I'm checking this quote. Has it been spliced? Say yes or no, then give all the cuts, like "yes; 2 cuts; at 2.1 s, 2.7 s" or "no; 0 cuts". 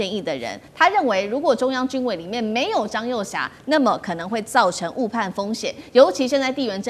no; 0 cuts